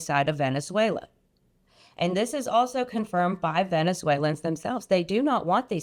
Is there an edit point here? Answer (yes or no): no